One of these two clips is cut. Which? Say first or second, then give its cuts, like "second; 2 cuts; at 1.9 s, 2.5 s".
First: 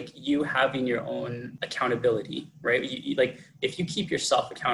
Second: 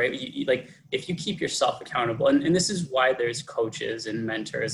first; 1 cut; at 1.5 s